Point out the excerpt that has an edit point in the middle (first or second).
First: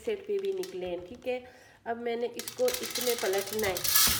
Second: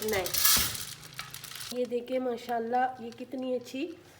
second